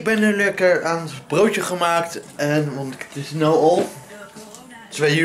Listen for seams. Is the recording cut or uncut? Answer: uncut